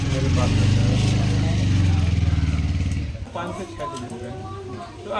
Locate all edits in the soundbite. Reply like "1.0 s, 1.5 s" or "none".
3.3 s